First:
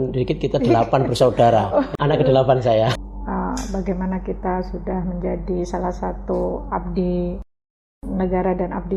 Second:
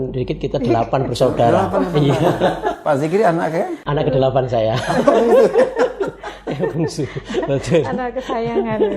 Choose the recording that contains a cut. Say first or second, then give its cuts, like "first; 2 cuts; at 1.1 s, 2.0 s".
first; 2 cuts; at 1.9 s, 2.9 s